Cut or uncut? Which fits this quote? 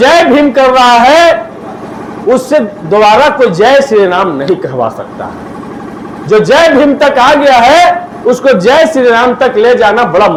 uncut